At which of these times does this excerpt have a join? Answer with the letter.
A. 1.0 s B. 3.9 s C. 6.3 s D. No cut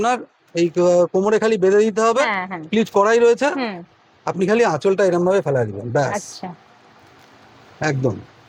D